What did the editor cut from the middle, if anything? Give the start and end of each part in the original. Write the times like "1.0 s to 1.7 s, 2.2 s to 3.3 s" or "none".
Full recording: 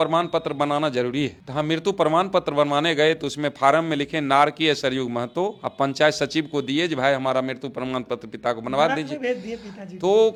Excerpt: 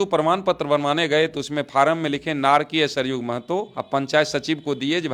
none

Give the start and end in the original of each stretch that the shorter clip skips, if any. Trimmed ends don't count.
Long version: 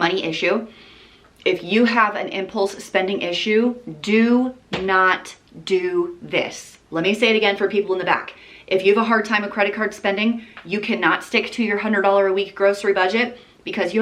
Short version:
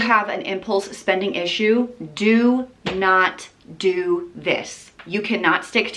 6.8 s to 10.5 s

